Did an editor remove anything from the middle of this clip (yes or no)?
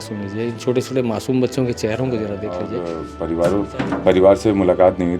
yes